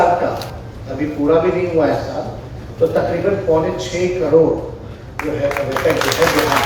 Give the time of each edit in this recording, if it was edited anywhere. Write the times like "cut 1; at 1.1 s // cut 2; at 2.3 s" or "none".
none